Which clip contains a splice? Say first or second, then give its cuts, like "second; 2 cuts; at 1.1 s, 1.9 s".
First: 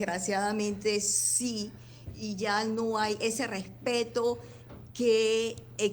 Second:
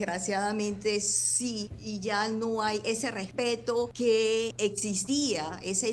second; 3 cuts; at 1.7 s, 3.4 s, 4.8 s